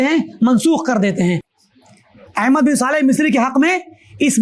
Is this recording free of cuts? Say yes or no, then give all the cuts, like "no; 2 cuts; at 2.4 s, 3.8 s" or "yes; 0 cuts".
no; 1 cut; at 1.5 s